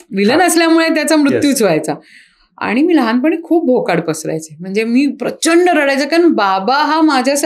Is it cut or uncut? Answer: uncut